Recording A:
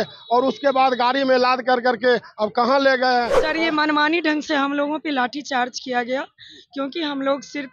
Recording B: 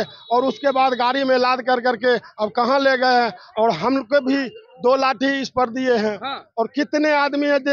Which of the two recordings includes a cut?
A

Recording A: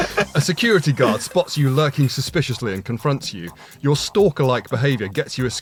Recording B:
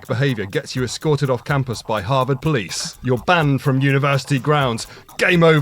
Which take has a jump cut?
B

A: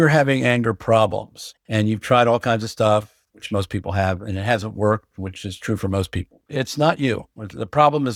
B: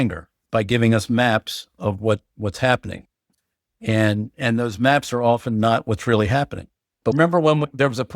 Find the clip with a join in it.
B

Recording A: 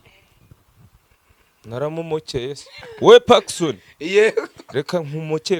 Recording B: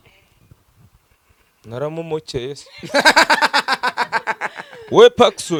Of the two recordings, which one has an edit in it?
A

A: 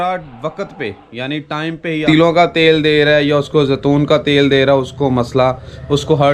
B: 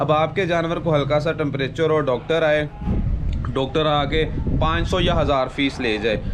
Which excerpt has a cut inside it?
A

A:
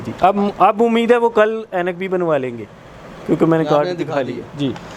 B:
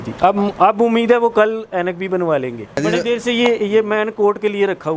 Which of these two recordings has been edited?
B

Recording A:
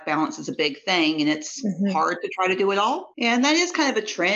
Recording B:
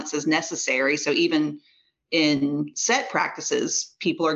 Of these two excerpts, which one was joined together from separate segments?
A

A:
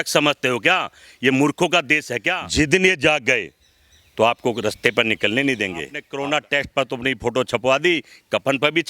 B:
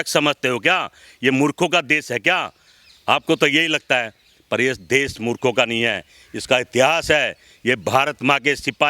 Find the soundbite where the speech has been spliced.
A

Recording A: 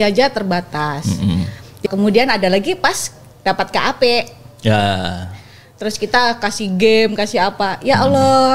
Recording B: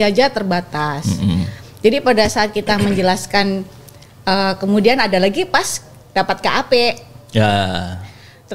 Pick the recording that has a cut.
A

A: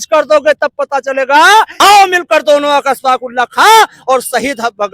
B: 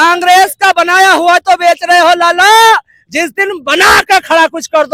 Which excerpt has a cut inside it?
A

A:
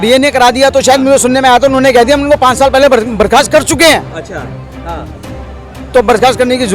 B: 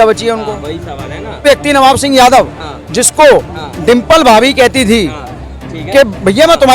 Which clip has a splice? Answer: B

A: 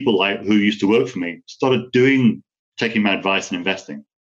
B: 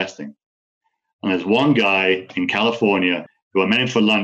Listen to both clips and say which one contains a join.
B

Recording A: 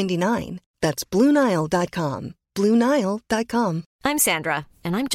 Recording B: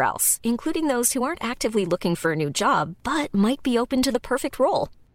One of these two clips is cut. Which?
A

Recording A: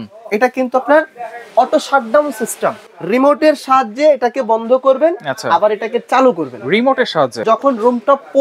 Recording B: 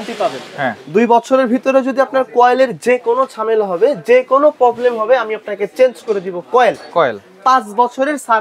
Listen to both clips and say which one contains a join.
A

